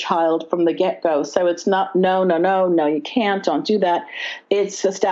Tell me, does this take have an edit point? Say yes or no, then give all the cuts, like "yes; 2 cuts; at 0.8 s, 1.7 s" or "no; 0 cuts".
no; 0 cuts